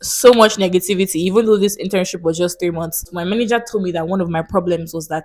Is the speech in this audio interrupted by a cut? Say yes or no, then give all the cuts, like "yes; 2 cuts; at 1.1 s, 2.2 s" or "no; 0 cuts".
yes; 1 cut; at 3.1 s